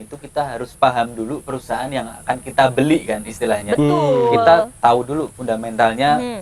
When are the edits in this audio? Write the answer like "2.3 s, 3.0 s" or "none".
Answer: none